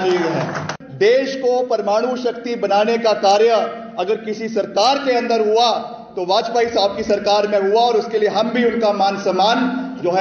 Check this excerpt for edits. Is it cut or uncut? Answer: uncut